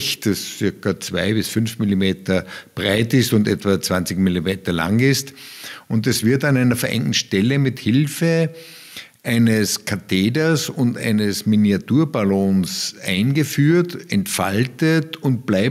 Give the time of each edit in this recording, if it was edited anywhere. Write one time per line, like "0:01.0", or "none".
none